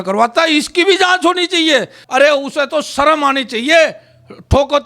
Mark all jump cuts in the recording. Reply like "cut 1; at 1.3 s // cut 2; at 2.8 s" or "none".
cut 1; at 2.0 s